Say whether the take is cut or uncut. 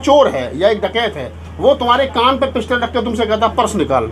uncut